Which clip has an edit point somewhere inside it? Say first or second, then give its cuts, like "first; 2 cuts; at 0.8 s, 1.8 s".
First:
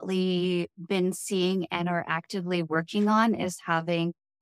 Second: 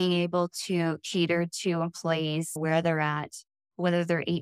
second; 1 cut; at 2.6 s